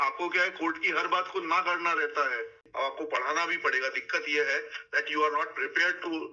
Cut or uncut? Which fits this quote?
cut